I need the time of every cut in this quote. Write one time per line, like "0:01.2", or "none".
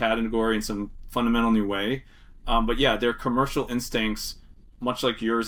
none